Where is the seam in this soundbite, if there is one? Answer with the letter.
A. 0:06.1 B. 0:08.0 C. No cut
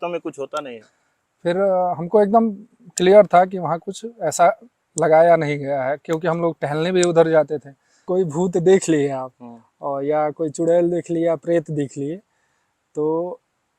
B